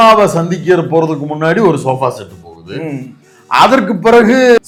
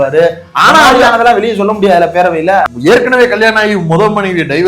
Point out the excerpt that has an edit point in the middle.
second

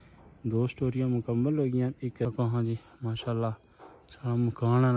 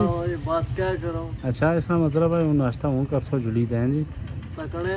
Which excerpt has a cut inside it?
first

